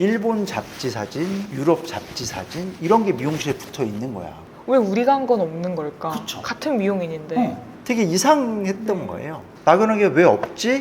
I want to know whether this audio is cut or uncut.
uncut